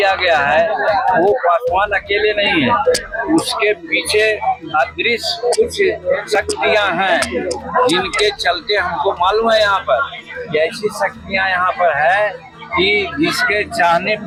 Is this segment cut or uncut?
uncut